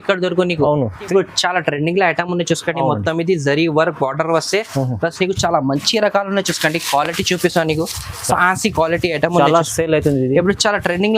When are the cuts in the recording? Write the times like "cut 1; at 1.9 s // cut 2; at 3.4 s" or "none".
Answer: cut 1; at 1.1 s